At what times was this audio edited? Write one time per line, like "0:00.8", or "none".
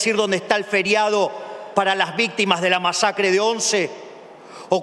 none